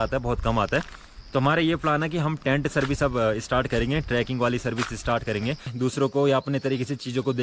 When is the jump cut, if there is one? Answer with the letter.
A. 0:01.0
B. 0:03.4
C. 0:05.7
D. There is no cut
C